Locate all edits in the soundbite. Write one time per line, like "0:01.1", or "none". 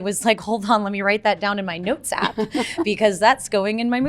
none